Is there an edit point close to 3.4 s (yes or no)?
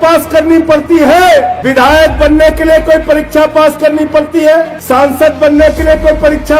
no